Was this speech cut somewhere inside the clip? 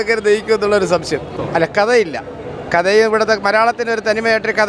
yes; 1 cut; at 1.3 s

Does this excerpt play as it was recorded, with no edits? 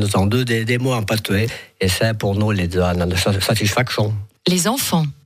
no; 1 cut; at 4.2 s

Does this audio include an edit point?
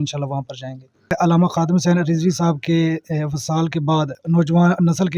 yes; 2 cuts; at 1.1 s, 4.2 s

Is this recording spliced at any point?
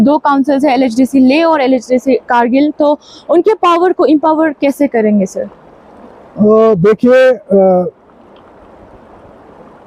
no; 0 cuts

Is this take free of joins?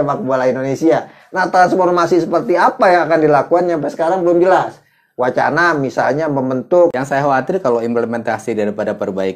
no; 1 cut; at 7.0 s

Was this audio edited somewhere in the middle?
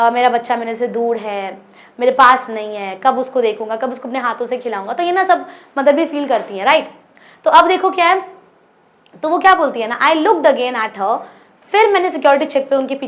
no; 0 cuts

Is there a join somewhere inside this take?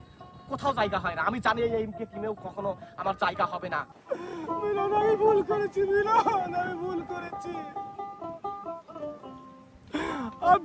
yes; 1 cut; at 3.9 s

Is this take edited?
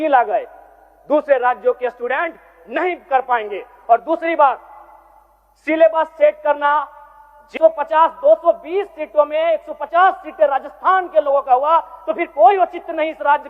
yes; 1 cut; at 7.5 s

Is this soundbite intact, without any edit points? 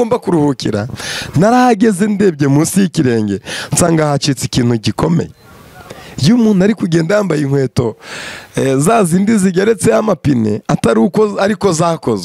yes; 0 cuts

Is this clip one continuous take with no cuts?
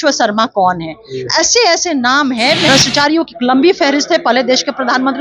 no; 1 cut; at 2.7 s

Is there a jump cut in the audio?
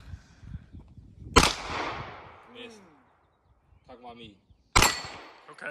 no; 0 cuts

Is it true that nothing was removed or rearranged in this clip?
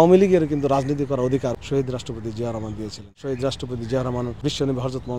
no; 3 cuts; at 1.6 s, 3.1 s, 4.4 s

